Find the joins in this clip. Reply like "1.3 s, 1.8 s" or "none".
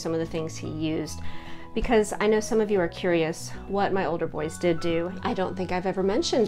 5.1 s